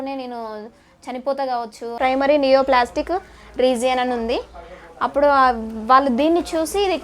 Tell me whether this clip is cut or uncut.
cut